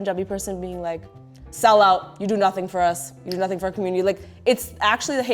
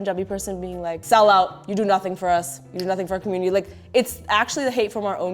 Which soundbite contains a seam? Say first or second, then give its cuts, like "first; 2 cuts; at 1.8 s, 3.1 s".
second; 1 cut; at 1.0 s